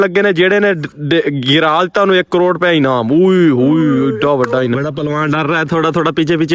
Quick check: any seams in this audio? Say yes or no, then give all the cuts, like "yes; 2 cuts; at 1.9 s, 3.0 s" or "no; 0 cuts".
yes; 1 cut; at 4.7 s